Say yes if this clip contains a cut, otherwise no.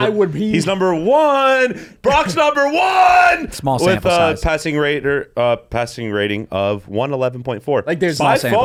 no